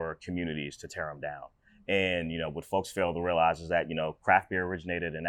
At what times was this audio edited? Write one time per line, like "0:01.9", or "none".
none